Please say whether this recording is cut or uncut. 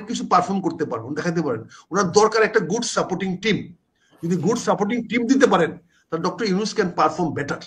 uncut